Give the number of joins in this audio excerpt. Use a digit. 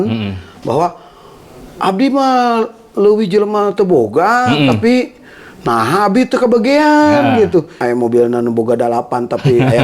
1